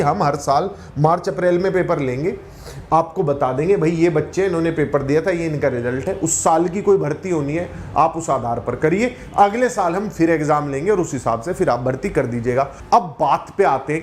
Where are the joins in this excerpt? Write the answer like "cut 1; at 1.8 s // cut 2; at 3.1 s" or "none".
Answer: cut 1; at 12.8 s

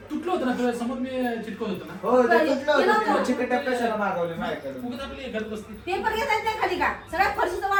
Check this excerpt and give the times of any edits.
none

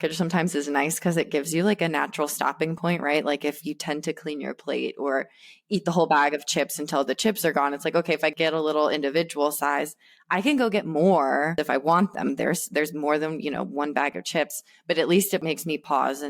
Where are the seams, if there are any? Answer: cut 1; at 11.5 s // cut 2; at 15.4 s

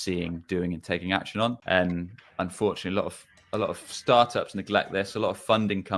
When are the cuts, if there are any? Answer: cut 1; at 1.6 s

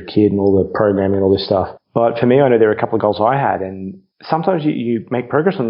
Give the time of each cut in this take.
none

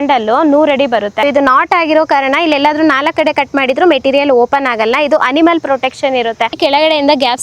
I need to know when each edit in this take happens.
cut 1; at 1.2 s // cut 2; at 6.6 s

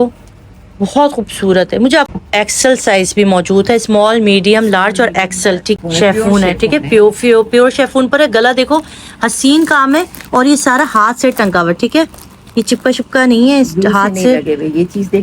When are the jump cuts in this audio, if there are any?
cut 1; at 2.1 s // cut 2; at 5.8 s

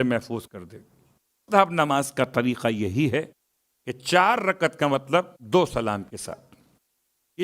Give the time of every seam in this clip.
cut 1; at 1.4 s

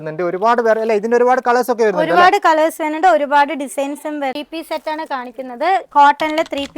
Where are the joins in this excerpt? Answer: cut 1; at 4.4 s

